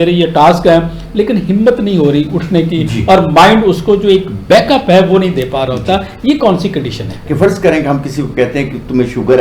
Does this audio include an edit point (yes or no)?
yes